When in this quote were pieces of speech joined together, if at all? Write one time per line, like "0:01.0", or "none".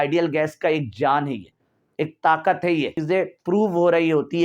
0:03.0